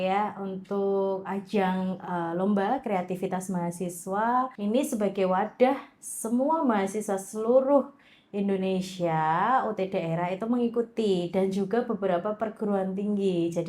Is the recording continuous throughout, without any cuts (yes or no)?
no